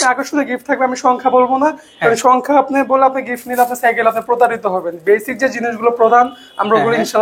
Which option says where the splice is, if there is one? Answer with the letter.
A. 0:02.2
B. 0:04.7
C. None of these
C